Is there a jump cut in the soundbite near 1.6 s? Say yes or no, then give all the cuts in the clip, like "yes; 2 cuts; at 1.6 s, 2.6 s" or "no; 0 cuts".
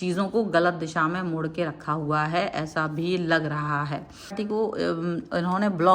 no; 1 cut; at 4.3 s